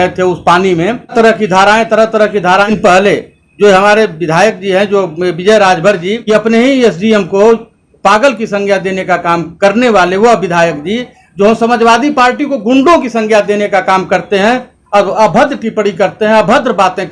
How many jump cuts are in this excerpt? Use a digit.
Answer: 3